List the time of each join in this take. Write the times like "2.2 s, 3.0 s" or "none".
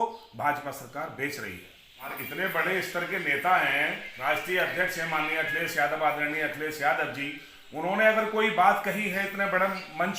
2.1 s